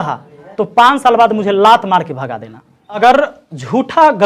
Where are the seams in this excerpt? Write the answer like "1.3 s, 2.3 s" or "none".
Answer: 3.0 s